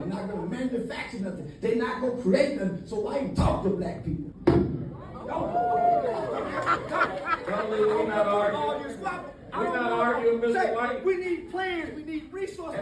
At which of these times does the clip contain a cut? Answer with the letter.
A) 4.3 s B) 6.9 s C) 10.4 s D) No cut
A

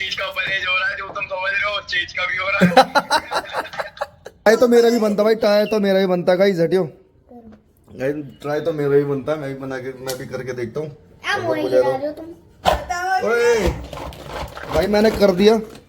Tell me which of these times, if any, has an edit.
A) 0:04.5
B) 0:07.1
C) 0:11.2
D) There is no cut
A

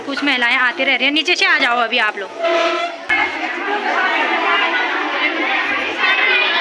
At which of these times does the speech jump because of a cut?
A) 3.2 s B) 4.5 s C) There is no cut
A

